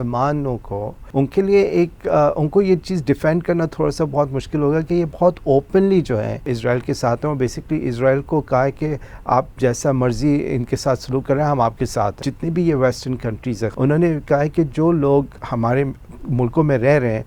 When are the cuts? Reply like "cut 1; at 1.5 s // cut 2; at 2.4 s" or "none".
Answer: cut 1; at 1.0 s // cut 2; at 6.5 s // cut 3; at 12.2 s // cut 4; at 13.7 s // cut 5; at 15.4 s